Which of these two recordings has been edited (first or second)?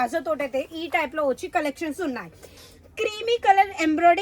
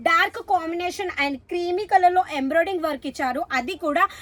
first